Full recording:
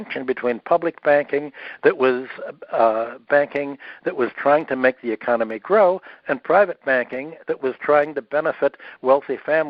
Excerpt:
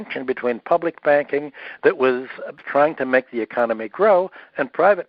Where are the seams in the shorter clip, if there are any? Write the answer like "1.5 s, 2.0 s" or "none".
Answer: 2.6 s